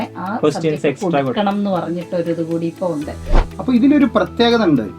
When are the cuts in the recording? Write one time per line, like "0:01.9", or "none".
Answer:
0:03.2